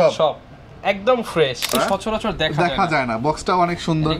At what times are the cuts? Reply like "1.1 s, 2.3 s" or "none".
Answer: 1.7 s